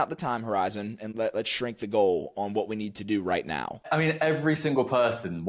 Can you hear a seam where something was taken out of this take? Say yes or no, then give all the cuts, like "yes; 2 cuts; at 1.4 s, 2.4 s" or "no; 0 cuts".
yes; 2 cuts; at 1.0 s, 3.8 s